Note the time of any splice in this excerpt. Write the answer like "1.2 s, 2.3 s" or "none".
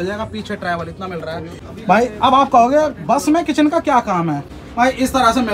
1.6 s, 4.5 s